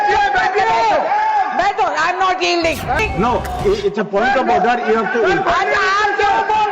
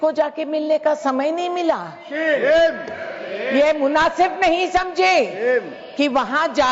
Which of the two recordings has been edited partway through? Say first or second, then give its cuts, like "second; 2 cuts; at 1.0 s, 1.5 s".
first; 1 cut; at 3.0 s